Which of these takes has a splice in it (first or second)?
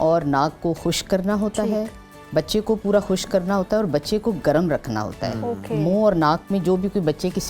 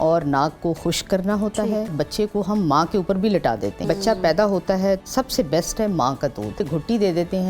second